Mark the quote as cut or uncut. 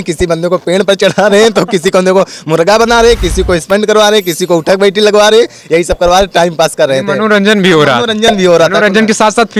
uncut